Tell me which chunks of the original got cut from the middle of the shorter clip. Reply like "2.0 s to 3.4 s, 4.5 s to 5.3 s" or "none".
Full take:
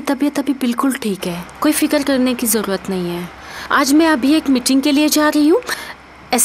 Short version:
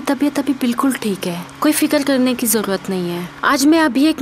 3.3 s to 3.5 s